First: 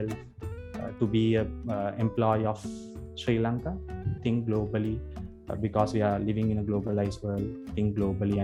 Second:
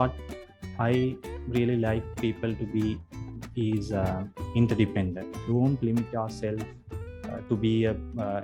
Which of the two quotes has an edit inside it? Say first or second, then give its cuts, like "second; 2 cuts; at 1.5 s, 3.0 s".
second; 1 cut; at 5.4 s